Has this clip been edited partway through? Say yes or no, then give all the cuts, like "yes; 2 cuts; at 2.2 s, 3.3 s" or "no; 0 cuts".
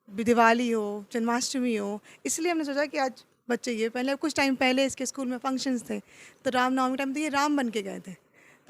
no; 0 cuts